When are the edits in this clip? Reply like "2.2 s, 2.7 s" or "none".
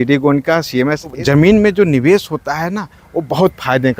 1.2 s